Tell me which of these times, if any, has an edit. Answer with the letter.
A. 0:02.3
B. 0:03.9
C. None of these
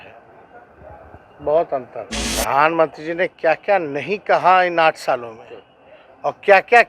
A